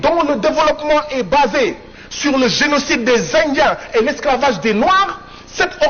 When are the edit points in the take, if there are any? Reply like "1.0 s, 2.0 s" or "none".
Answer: none

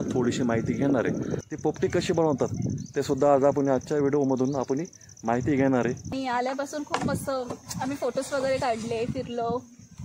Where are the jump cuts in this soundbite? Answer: 1.4 s, 6.1 s

